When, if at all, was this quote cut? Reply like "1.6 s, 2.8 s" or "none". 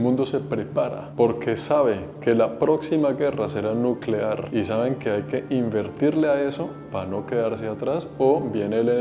none